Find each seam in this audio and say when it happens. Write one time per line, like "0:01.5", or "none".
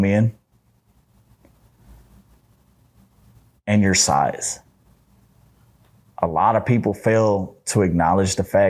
none